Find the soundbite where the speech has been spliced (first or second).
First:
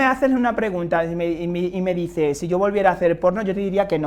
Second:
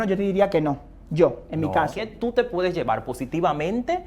second